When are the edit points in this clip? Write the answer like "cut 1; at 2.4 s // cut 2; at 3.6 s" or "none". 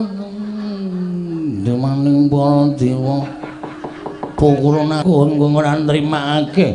cut 1; at 5.0 s